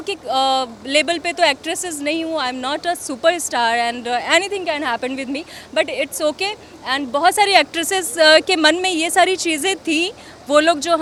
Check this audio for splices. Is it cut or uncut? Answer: uncut